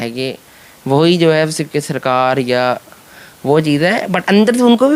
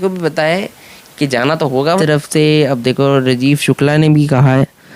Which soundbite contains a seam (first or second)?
second